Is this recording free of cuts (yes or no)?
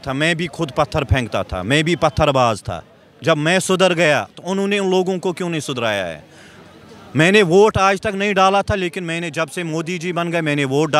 yes